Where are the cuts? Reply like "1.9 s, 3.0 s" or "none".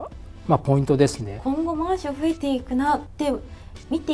1.3 s, 3.1 s